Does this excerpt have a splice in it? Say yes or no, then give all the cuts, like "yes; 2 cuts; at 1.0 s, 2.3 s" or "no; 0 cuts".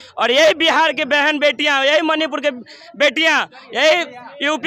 no; 0 cuts